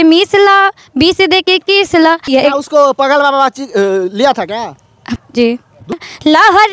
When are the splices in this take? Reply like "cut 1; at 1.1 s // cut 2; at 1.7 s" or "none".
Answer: cut 1; at 2.2 s // cut 2; at 5.0 s // cut 3; at 6.0 s